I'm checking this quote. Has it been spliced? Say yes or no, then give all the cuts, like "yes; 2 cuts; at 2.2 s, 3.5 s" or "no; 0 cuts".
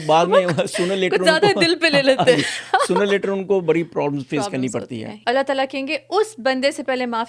yes; 1 cut; at 5.1 s